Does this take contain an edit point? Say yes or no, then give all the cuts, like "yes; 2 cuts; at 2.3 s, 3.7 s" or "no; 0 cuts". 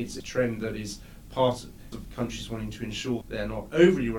yes; 1 cut; at 2.0 s